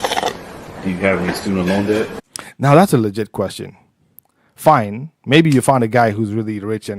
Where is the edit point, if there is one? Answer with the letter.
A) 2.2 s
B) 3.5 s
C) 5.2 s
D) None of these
D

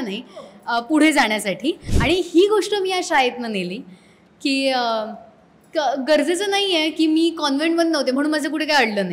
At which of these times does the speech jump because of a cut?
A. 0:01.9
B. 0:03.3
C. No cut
A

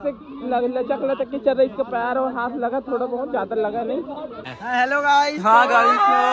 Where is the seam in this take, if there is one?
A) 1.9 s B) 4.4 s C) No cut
B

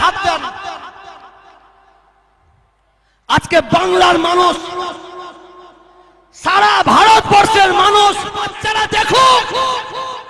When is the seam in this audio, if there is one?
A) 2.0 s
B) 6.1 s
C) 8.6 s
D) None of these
C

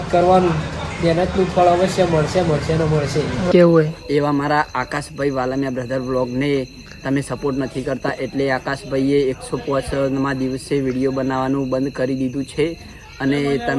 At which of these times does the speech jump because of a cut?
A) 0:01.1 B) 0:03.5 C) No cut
B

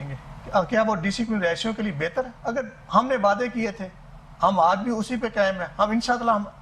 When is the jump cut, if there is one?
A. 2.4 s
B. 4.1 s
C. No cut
A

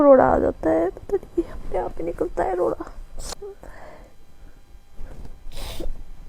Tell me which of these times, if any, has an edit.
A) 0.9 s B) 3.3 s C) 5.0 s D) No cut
B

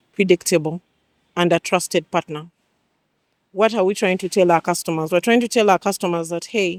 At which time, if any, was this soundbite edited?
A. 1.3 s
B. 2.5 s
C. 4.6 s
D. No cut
D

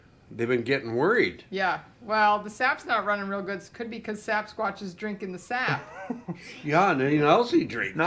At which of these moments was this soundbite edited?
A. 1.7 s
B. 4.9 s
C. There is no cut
C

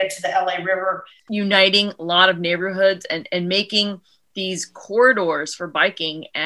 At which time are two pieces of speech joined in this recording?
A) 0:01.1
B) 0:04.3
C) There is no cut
A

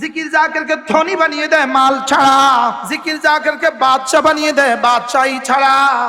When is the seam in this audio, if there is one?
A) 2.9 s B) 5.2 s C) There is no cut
A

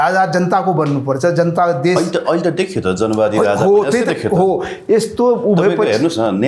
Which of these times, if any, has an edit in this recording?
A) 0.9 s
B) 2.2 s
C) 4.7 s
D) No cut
D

